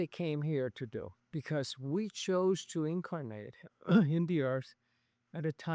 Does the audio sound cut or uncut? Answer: cut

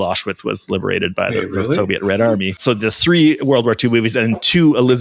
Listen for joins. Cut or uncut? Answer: cut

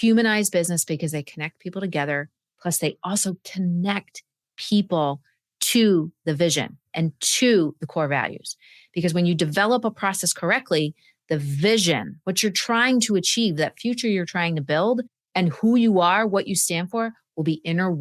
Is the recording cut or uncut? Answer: uncut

